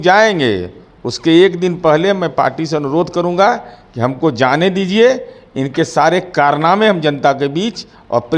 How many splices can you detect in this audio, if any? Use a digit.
0